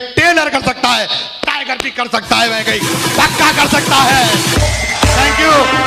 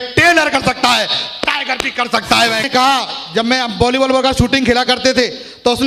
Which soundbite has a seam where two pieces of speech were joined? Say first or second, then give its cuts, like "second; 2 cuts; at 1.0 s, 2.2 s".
second; 1 cut; at 2.7 s